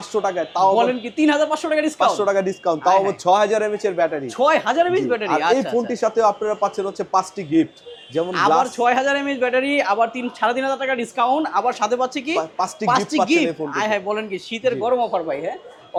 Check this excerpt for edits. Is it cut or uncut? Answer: uncut